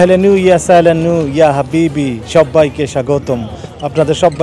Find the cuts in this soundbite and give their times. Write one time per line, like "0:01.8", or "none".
none